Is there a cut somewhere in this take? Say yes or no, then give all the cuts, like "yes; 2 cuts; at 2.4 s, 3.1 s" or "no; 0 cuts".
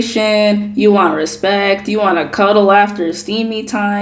no; 0 cuts